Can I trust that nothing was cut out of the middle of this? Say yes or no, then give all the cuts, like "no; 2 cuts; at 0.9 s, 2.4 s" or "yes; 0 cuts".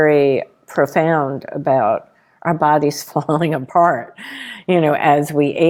yes; 0 cuts